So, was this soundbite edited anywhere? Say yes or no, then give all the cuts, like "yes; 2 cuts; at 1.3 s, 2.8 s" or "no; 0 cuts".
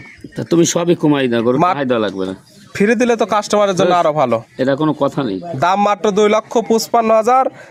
no; 0 cuts